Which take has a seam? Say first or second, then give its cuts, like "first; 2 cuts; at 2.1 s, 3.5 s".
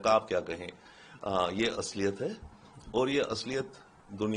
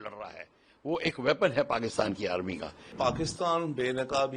second; 1 cut; at 2.9 s